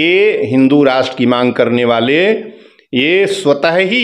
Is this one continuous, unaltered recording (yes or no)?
yes